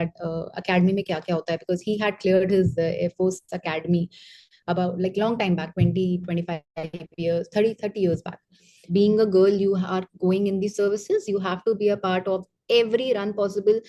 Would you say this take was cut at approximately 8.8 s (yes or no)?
yes